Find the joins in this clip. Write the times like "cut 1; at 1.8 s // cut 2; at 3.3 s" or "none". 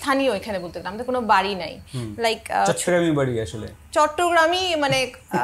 none